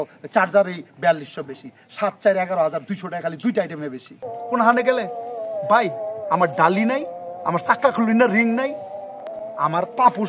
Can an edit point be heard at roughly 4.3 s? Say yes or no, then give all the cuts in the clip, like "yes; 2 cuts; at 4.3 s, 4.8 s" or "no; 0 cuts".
yes; 1 cut; at 4.3 s